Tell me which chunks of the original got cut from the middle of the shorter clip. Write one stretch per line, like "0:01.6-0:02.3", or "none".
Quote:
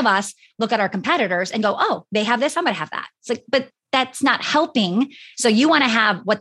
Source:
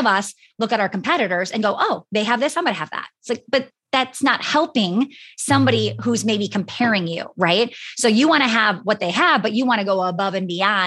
0:05.2-0:07.8